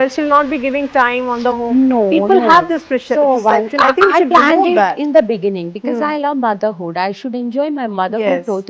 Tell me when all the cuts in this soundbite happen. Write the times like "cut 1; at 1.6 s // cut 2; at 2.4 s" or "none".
none